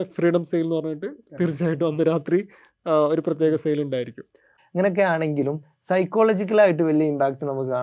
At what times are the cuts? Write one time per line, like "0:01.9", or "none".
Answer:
0:04.5